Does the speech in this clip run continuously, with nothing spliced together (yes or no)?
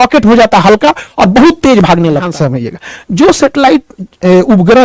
no